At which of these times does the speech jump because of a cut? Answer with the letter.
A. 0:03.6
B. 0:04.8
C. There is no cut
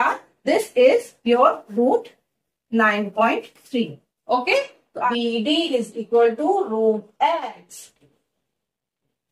B